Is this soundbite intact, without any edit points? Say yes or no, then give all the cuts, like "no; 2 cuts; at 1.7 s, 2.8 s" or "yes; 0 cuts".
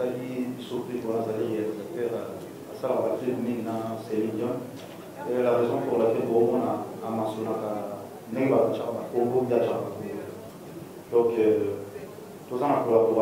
yes; 0 cuts